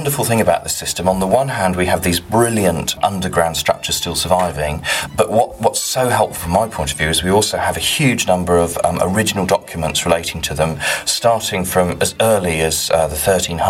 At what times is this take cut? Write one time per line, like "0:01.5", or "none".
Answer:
0:03.0
0:05.0